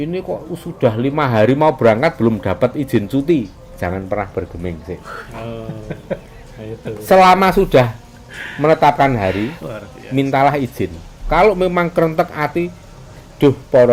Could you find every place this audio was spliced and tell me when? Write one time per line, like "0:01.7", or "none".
none

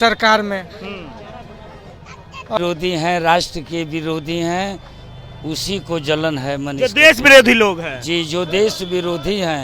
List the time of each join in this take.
0:02.6

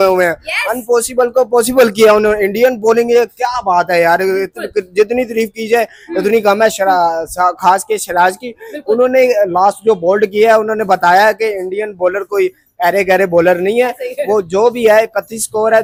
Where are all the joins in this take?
none

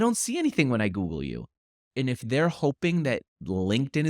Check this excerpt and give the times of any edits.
0:01.8

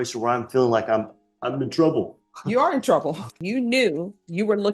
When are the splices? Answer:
0:03.5

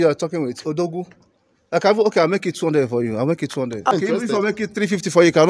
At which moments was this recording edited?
0:03.9

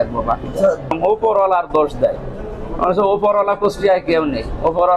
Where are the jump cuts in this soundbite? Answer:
0:00.9

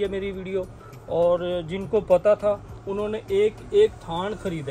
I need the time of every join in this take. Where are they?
none

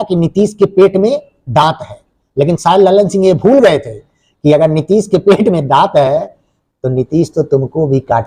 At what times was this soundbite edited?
none

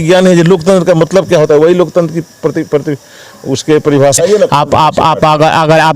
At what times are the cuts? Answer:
0:04.2

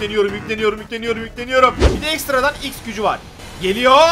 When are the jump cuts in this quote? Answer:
0:01.8

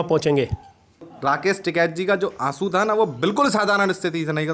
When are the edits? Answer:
0:01.1

